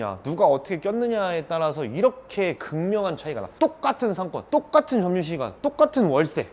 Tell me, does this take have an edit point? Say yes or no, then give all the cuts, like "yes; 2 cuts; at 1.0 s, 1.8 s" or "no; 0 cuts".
no; 0 cuts